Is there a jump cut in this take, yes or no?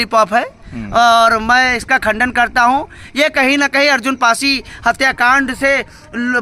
no